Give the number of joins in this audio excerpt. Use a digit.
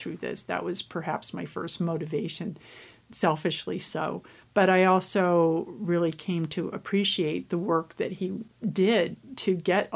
1